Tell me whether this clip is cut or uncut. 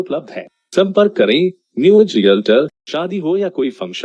cut